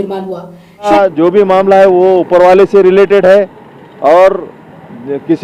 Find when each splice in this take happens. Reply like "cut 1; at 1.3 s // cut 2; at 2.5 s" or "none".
cut 1; at 0.9 s